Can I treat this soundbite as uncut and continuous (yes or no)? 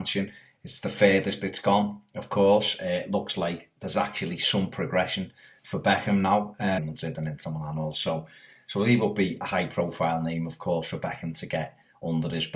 yes